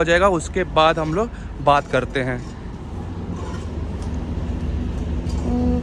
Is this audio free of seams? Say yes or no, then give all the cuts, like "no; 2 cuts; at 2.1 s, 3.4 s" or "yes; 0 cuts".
yes; 0 cuts